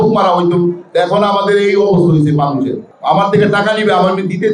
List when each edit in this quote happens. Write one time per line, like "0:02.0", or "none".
0:02.9